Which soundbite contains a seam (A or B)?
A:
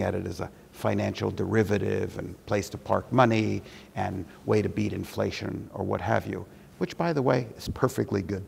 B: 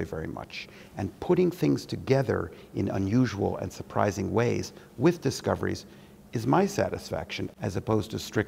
B